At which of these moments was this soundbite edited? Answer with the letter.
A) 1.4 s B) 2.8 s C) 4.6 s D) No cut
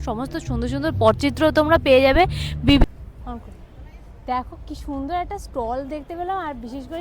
B